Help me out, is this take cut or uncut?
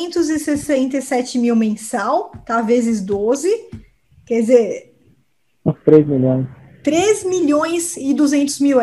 uncut